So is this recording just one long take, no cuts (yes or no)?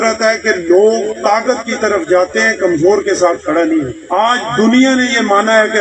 yes